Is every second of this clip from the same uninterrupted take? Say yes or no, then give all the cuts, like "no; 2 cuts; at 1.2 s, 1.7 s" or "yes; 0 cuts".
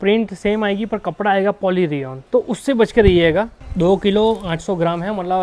no; 2 cuts; at 2.1 s, 3.6 s